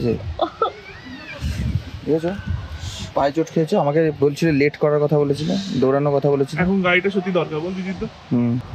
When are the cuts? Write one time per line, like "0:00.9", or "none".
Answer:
none